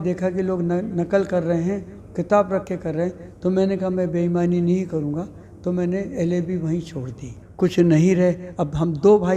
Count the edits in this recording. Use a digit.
1